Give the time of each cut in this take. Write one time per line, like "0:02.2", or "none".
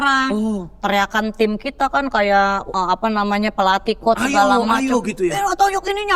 0:02.7